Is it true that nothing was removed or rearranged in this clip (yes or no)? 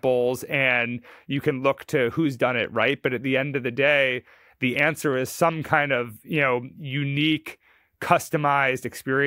yes